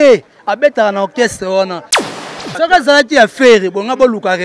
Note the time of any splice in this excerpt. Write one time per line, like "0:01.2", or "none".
0:02.2